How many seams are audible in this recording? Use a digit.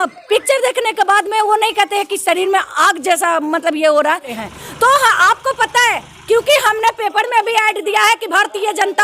1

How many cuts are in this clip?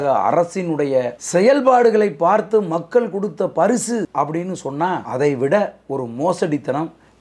3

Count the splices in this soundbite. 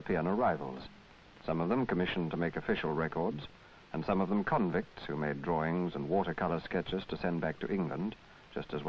0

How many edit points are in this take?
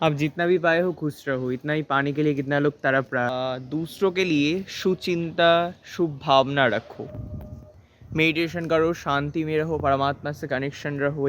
1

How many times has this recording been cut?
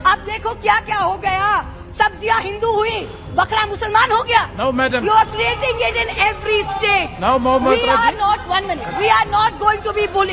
0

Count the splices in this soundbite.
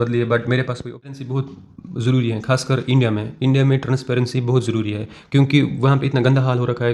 1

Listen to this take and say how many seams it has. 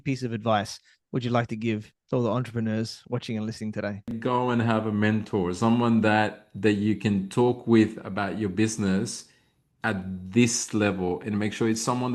1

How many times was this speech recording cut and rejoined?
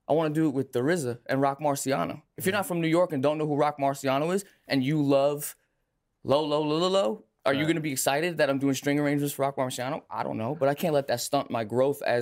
0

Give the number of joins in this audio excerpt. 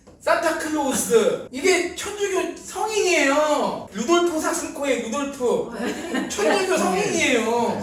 2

